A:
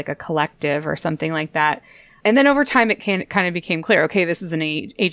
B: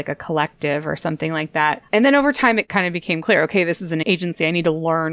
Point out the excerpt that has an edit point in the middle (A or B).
B